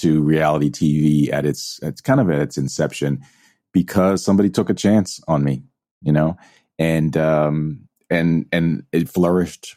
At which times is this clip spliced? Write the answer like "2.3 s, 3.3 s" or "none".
none